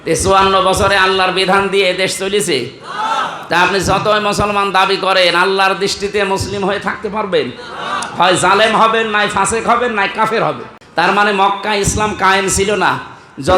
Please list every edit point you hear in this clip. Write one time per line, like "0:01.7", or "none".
0:10.7